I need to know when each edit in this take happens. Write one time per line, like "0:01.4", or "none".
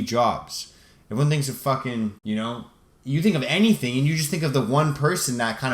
0:02.2